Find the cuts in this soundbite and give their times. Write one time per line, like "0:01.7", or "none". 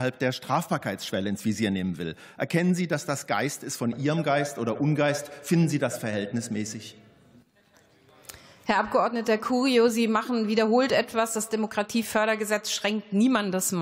none